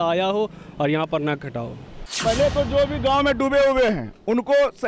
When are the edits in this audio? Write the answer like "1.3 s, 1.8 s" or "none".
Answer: 2.1 s